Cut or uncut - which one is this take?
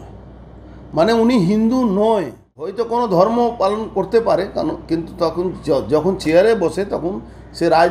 cut